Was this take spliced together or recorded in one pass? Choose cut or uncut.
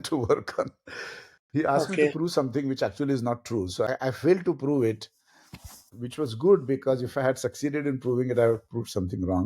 cut